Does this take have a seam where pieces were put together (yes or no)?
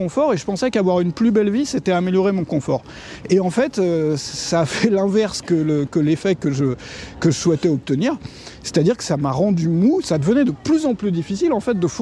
yes